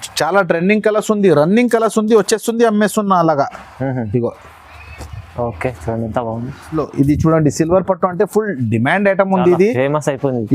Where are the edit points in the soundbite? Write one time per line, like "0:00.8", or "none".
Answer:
0:06.7